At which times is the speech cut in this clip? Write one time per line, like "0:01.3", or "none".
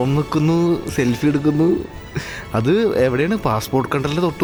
none